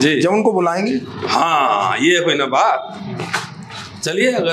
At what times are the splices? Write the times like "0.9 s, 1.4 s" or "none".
none